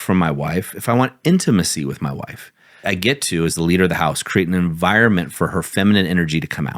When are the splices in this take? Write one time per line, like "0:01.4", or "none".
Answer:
0:02.8